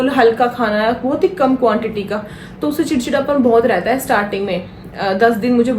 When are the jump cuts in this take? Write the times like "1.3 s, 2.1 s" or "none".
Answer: none